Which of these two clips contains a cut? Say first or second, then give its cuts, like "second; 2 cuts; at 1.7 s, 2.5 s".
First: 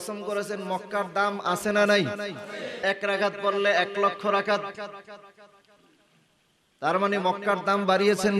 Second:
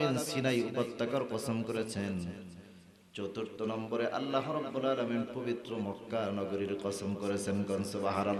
first; 1 cut; at 2.8 s